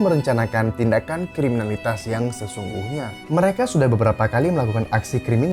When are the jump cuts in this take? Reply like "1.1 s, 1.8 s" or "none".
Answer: none